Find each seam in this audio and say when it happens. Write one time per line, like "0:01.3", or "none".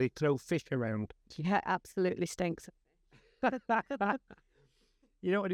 none